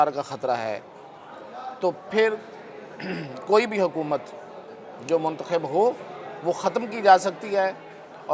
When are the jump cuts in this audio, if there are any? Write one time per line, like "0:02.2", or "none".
none